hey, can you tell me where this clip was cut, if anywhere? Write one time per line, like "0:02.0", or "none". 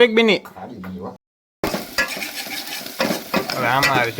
0:01.2